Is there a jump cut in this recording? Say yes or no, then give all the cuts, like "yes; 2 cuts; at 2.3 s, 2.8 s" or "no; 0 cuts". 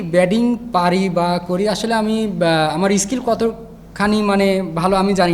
no; 0 cuts